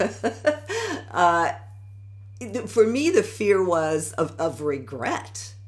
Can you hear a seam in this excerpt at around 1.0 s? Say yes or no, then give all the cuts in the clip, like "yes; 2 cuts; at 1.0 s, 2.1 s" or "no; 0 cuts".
no; 0 cuts